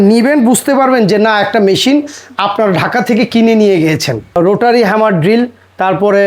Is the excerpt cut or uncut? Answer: cut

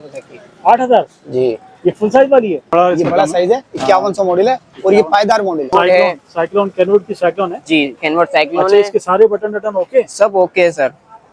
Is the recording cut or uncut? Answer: cut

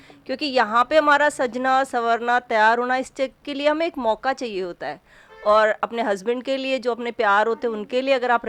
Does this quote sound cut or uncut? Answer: uncut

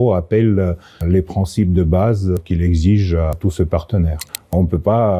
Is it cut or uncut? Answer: cut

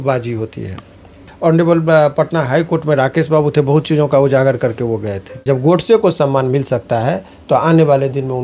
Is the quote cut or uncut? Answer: cut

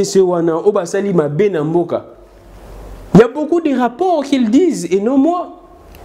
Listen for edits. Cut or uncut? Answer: uncut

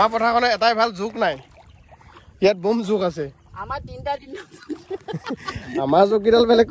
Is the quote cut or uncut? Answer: uncut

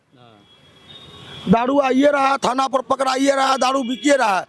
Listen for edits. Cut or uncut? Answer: uncut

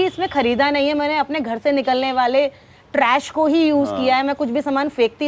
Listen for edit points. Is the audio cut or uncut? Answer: uncut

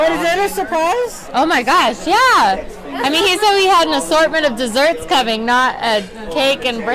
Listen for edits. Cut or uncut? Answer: uncut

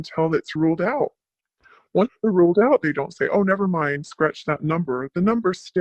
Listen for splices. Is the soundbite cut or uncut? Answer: uncut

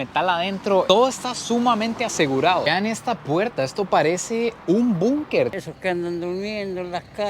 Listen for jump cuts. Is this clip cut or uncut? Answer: cut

